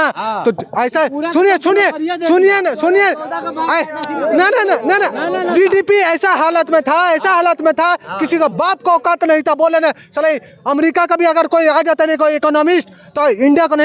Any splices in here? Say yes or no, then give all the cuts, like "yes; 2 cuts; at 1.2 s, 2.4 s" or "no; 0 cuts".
no; 0 cuts